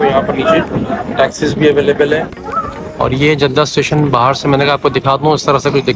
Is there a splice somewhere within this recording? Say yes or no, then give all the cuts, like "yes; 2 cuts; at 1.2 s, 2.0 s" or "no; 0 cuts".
yes; 1 cut; at 2.4 s